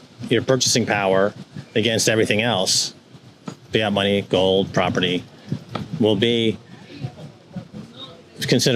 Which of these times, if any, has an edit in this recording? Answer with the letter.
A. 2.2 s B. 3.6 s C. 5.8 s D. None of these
D